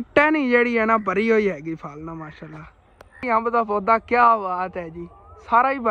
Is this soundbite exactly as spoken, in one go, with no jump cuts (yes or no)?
no